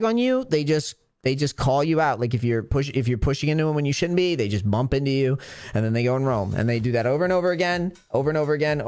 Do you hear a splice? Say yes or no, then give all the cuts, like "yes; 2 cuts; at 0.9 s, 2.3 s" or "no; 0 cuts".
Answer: no; 0 cuts